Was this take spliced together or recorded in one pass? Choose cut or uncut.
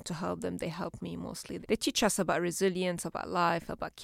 cut